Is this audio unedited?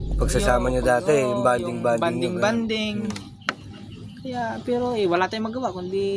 yes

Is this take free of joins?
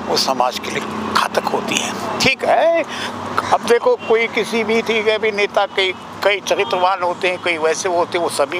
yes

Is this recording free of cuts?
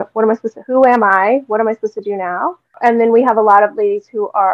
no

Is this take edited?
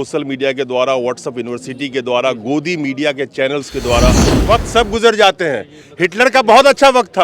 yes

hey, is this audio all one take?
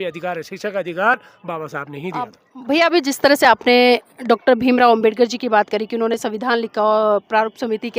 no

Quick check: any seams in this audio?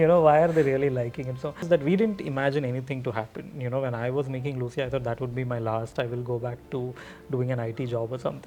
yes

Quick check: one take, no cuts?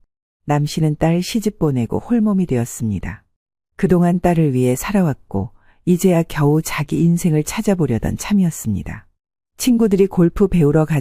yes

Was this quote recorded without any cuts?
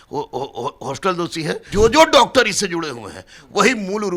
no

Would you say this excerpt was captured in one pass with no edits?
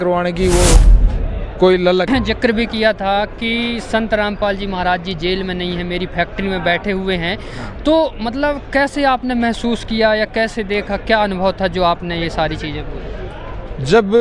no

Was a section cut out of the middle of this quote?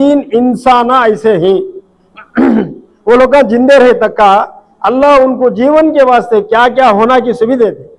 no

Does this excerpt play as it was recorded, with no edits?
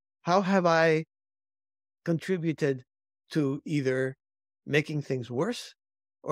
yes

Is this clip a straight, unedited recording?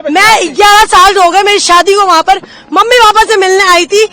yes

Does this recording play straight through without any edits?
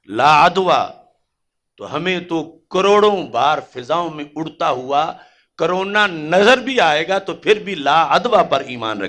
yes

